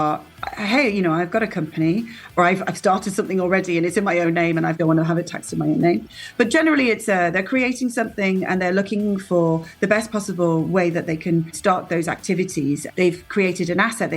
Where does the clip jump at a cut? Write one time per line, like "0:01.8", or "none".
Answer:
0:02.4
0:04.8
0:11.6
0:12.9

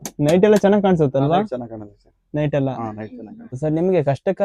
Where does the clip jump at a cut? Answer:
0:03.5

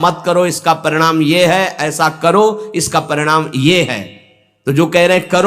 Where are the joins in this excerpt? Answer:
none

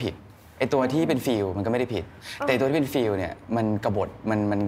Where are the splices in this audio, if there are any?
none

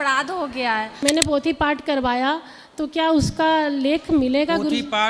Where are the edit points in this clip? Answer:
0:01.0

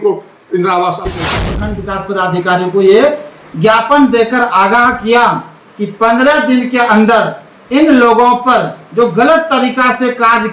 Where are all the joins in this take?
0:01.4

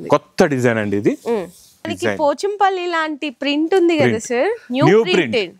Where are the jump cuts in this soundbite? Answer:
0:01.9

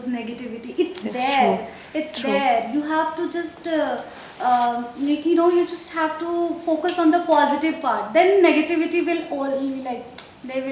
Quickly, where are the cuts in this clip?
none

